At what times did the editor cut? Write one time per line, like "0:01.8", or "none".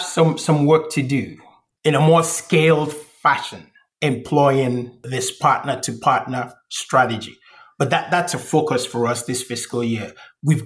0:05.0